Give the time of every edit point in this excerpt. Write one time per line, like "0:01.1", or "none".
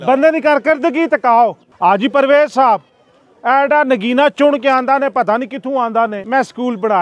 0:01.7
0:06.2